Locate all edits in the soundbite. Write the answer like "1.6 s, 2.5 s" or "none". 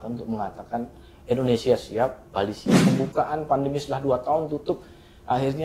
2.8 s